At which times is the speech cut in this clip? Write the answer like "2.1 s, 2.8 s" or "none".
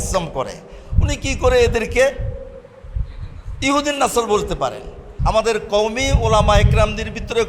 5.1 s